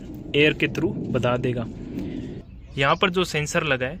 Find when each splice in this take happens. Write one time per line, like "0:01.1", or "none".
0:02.4